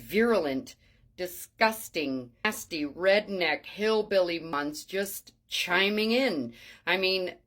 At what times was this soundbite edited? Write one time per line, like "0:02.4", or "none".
0:02.4
0:04.5